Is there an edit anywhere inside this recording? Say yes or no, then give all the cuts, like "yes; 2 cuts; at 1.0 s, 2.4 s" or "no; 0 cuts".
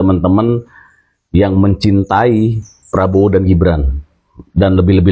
no; 0 cuts